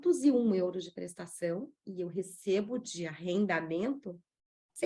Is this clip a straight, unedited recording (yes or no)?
yes